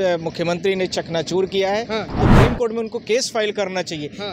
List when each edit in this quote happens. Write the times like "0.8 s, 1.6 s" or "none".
2.1 s

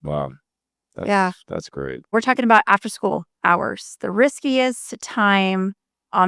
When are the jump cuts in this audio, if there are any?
2.1 s

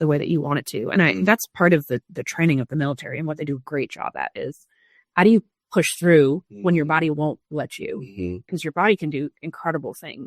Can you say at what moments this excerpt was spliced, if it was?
8.5 s

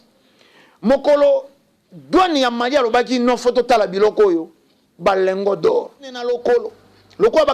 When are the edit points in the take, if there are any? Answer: 6.2 s

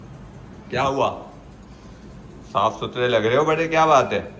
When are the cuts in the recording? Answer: none

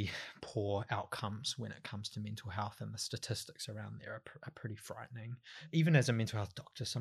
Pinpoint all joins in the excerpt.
5.7 s

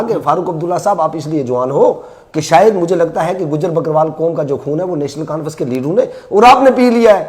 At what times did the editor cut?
none

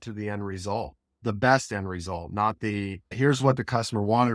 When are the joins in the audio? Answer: 1.1 s, 3.2 s

